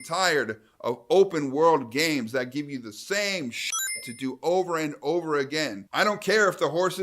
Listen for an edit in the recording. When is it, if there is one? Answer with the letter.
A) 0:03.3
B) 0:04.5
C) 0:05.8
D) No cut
C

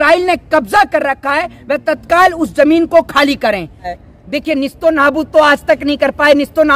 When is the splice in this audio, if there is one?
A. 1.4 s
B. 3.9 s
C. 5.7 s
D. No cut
B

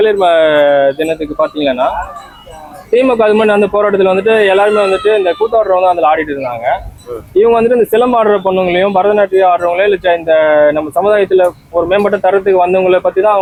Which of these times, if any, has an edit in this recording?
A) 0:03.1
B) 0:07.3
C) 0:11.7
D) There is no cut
D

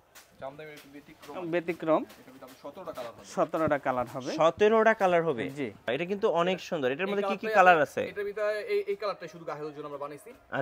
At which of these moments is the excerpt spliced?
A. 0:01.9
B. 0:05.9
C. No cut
B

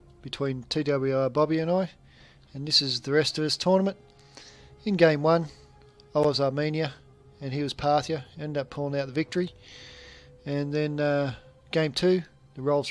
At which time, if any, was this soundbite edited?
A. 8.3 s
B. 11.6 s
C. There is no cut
A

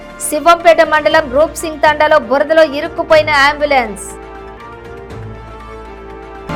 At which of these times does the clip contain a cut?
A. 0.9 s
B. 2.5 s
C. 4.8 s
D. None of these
D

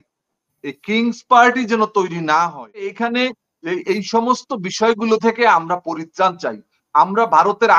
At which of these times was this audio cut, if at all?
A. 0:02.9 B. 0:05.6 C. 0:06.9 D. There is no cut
A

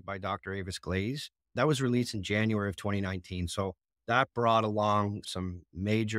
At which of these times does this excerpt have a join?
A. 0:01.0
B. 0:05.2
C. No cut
B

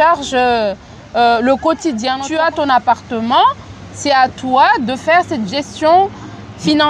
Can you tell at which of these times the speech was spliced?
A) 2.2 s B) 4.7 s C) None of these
A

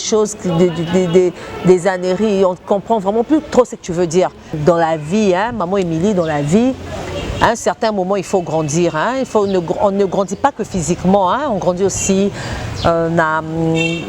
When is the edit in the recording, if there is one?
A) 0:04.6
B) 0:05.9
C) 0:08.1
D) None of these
A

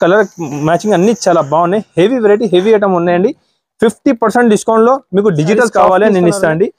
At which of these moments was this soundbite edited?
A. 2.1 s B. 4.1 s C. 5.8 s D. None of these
C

